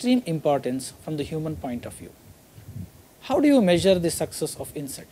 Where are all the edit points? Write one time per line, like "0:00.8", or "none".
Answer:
0:04.0